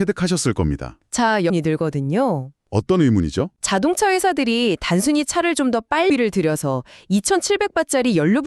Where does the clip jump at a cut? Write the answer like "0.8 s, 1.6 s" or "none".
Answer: 1.5 s, 6.1 s